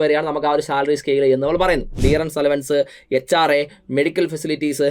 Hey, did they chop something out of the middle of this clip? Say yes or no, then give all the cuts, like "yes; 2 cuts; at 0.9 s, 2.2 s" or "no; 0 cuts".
yes; 1 cut; at 1.9 s